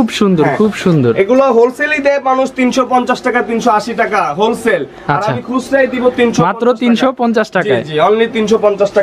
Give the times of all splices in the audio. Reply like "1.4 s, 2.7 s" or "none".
none